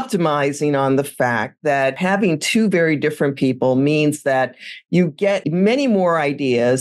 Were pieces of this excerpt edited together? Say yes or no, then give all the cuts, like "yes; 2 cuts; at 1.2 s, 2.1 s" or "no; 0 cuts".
yes; 2 cuts; at 2.0 s, 5.4 s